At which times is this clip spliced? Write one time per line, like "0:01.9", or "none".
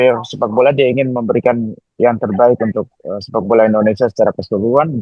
none